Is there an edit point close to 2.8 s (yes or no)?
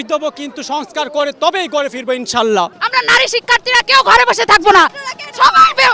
yes